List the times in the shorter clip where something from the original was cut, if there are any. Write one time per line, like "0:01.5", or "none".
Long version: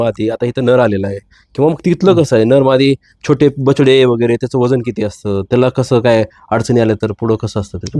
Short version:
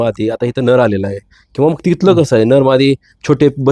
none

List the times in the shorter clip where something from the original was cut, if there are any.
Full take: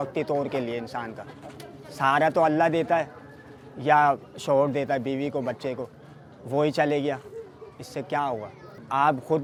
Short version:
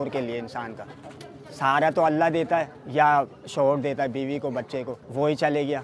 0:02.8
0:05.0

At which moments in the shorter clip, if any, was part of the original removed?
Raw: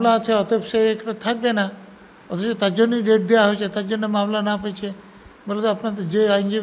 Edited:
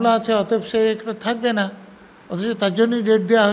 none

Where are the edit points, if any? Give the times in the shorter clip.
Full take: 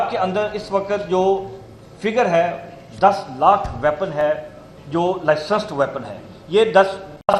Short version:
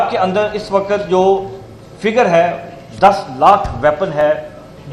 none

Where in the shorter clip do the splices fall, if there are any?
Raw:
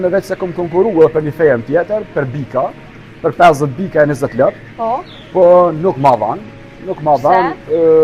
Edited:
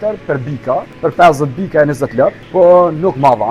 0:00.9
0:02.4

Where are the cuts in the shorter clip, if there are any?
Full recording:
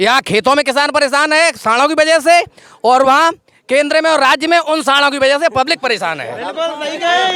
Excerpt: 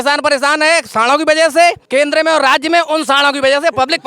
0:01.8

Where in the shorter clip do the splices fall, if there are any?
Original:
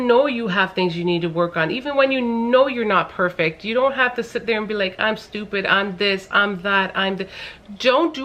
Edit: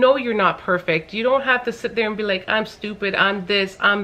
none

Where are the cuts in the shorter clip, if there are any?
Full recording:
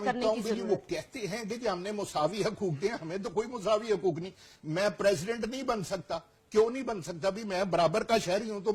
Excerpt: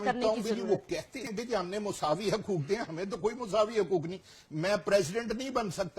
0:01.2

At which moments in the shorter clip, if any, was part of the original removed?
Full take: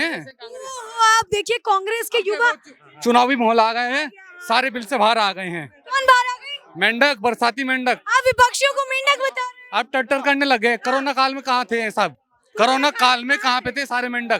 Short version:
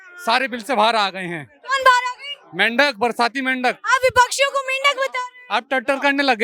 none

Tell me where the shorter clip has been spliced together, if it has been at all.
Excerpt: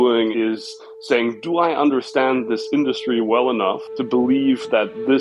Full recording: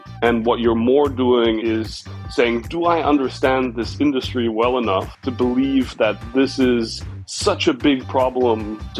none

